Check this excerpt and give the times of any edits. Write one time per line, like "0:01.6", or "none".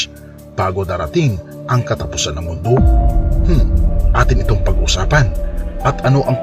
0:03.1